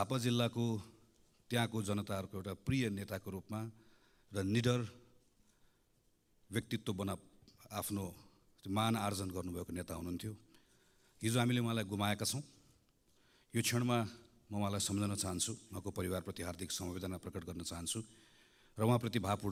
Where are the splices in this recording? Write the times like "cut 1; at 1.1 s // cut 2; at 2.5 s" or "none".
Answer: none